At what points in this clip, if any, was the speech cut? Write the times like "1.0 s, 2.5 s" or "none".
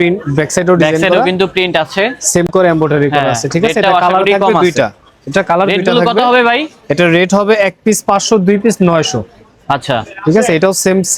none